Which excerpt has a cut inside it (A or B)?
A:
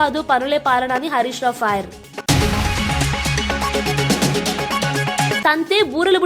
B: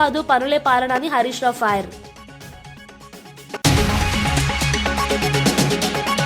A